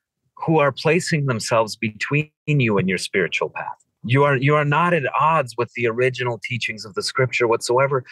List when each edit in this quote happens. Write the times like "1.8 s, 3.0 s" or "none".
4.0 s